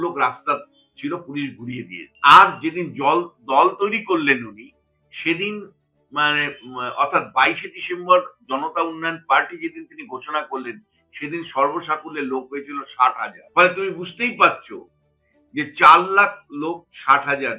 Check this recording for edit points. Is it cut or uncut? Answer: cut